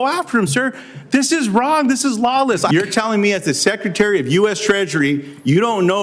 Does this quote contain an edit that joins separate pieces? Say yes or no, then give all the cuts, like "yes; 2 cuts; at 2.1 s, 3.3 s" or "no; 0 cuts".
yes; 1 cut; at 2.7 s